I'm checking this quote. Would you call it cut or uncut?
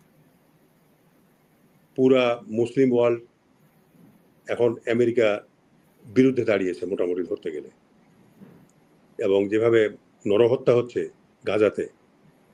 uncut